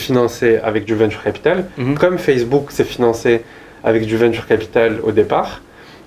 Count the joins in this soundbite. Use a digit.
0